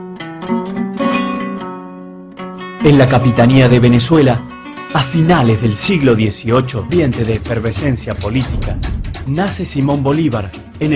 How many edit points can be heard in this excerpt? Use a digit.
0